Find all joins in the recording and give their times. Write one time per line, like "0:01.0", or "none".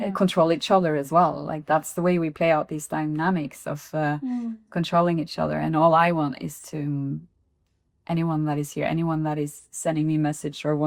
none